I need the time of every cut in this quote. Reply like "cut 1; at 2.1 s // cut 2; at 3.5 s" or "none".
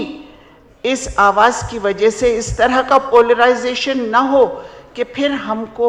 none